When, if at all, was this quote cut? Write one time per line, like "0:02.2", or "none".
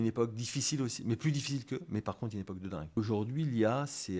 0:03.0